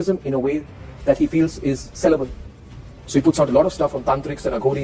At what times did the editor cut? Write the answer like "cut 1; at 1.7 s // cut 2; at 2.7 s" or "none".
none